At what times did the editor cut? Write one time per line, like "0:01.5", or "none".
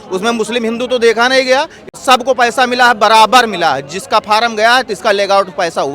0:01.9